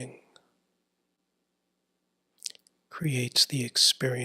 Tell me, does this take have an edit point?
yes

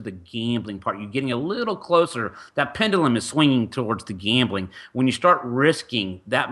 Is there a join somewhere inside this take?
no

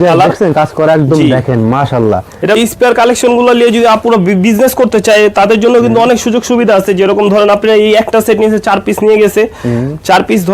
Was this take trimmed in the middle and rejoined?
yes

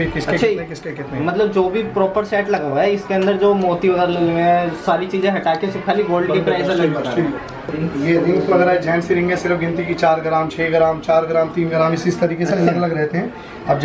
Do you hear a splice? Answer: yes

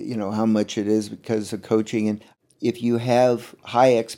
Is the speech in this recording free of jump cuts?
no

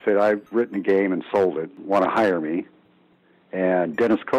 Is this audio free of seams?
no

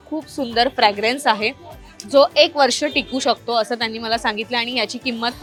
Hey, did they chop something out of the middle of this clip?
no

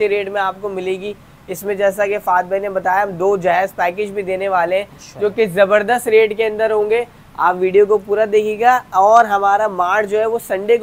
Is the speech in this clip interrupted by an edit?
no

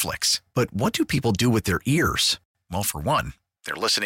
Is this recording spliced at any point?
no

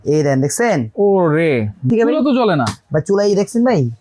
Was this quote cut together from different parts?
yes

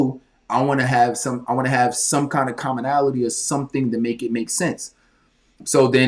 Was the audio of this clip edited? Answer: no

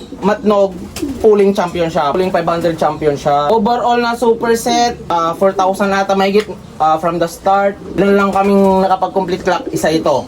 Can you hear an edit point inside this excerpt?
yes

